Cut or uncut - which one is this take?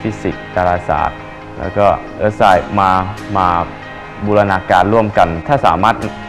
cut